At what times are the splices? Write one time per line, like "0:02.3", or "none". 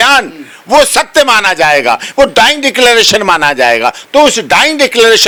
none